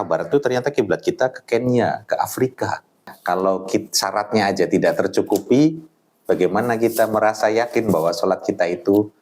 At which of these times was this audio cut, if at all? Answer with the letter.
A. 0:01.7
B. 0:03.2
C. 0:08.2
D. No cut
B